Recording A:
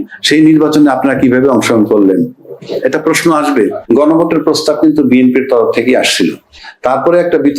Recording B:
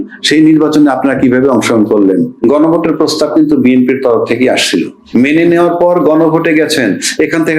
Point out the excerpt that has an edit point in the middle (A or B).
B